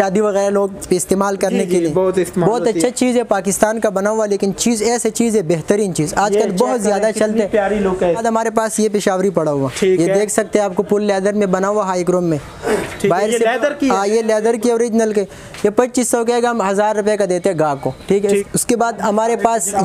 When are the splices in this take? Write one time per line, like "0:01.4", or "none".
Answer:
0:08.1
0:18.3